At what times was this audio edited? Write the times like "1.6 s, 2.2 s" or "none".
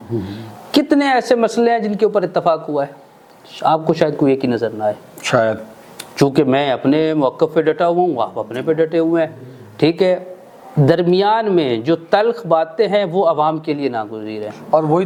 none